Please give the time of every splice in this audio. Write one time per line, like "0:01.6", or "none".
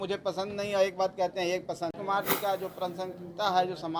0:01.9